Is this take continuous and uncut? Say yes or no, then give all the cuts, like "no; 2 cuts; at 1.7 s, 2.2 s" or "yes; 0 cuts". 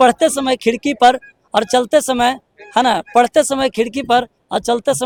yes; 0 cuts